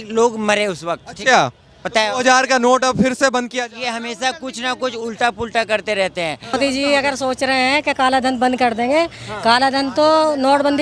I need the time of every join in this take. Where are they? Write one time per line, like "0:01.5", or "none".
0:06.6